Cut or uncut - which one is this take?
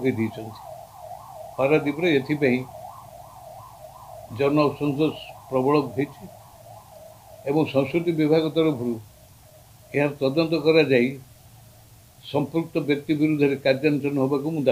uncut